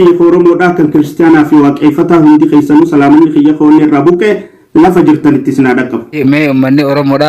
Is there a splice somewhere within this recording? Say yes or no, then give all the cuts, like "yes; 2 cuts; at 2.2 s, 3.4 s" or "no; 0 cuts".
yes; 1 cut; at 6.1 s